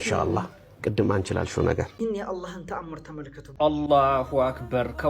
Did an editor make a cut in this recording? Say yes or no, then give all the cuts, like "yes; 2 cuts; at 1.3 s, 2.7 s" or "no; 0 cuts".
yes; 2 cuts; at 1.9 s, 3.4 s